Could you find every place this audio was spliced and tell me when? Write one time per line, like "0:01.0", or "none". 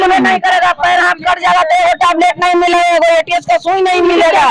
none